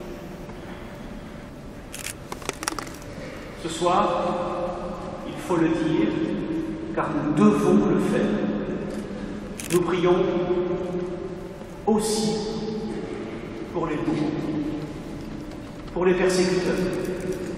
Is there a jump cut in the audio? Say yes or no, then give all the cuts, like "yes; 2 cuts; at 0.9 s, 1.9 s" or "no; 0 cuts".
yes; 1 cut; at 1.4 s